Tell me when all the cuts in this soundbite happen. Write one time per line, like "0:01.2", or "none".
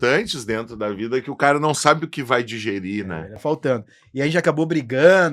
0:03.3